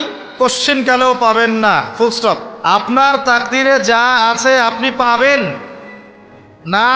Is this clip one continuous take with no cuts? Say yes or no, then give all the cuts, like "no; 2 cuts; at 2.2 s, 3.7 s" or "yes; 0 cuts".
no; 1 cut; at 2.5 s